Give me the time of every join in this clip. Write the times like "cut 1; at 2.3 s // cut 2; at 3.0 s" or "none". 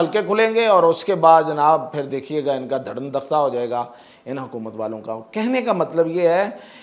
none